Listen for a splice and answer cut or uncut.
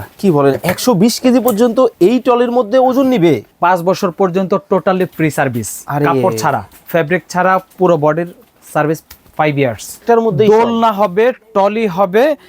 cut